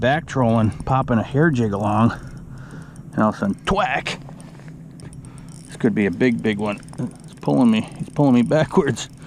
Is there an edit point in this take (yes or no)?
yes